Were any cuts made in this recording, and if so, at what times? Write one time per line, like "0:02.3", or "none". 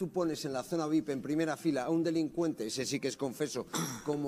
none